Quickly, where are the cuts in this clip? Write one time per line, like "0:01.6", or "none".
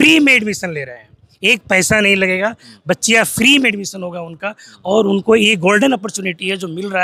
none